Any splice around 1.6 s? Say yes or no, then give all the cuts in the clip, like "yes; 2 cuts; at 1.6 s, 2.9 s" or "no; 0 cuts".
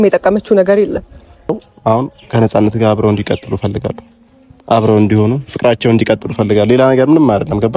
yes; 1 cut; at 1.6 s